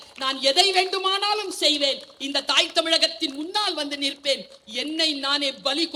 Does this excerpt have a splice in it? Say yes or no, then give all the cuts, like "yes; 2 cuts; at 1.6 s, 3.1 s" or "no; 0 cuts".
no; 0 cuts